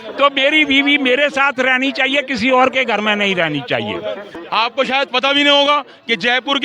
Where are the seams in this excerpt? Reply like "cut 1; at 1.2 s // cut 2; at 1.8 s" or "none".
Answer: cut 1; at 4.3 s